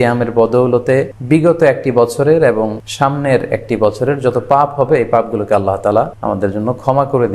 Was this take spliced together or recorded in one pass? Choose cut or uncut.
cut